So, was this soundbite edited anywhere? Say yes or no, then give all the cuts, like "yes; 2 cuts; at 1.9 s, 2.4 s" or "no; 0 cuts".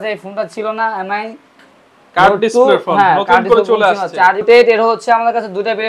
yes; 1 cut; at 4.4 s